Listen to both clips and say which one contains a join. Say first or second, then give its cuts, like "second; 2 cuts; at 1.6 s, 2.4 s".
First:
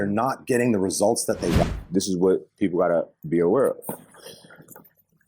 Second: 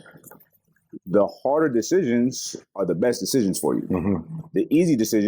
first; 1 cut; at 1.6 s